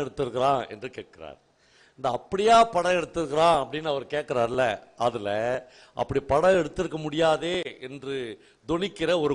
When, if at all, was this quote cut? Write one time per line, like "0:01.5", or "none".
none